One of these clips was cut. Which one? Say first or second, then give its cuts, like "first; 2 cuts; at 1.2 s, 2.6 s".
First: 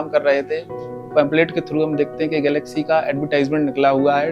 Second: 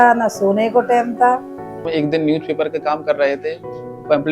second; 1 cut; at 1.9 s